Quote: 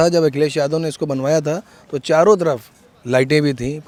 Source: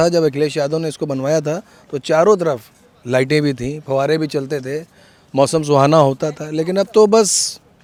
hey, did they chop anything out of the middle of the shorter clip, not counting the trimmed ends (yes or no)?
no